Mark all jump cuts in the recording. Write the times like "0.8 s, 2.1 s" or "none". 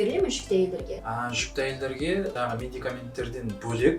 1.0 s, 2.3 s